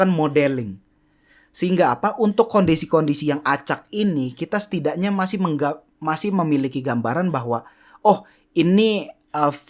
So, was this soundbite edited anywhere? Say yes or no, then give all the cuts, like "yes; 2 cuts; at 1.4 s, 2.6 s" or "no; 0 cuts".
no; 0 cuts